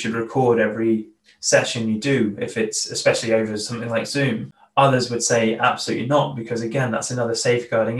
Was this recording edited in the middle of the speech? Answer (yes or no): yes